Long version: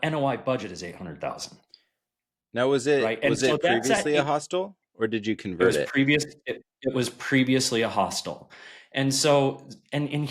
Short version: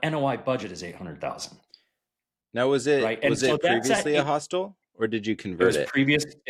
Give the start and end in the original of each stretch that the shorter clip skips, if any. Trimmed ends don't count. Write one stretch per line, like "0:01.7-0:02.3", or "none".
none